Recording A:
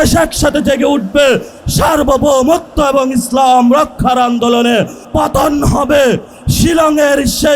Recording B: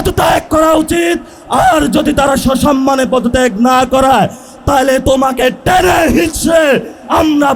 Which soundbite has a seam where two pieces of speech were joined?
A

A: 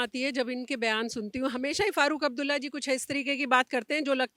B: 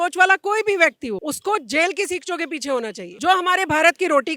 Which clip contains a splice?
B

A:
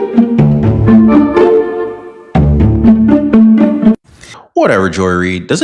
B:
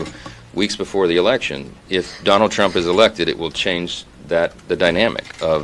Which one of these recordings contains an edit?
A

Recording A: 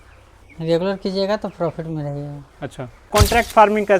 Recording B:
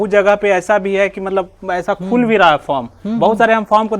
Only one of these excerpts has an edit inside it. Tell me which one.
A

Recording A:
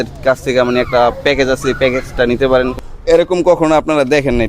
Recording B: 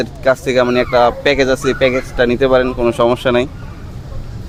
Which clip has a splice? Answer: A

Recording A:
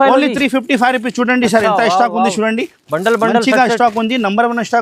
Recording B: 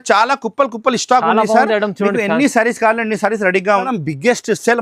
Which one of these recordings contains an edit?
B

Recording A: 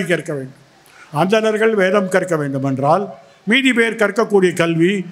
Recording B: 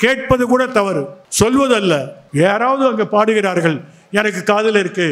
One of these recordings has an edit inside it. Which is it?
B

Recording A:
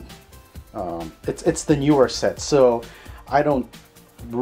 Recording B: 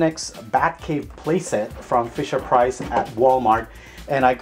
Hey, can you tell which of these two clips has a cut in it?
A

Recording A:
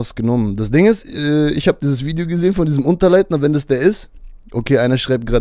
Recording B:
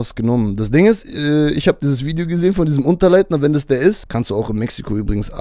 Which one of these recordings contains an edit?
B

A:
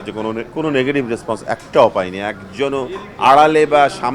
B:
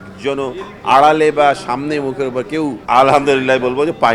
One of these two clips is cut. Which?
B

